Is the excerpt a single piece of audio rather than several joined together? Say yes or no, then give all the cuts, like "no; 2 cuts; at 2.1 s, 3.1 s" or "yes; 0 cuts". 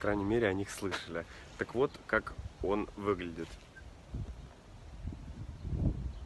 yes; 0 cuts